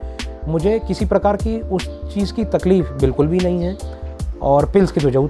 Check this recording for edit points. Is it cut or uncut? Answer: cut